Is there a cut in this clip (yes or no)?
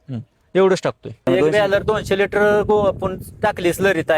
yes